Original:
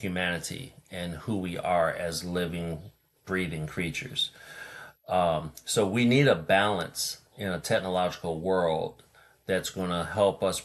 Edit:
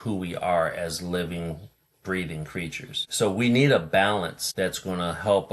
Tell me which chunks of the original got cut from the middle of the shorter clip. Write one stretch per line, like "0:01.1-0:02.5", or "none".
0:04.2-0:05.6
0:07.0-0:09.3